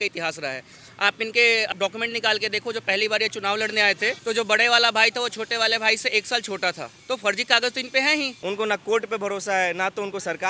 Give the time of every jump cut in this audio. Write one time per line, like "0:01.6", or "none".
0:01.7
0:04.2
0:06.9
0:08.4